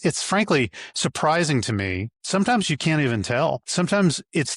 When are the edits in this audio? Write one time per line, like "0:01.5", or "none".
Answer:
0:02.1
0:03.7